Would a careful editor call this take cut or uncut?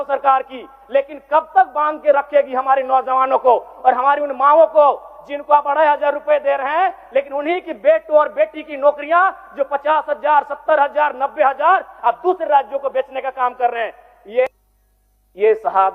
cut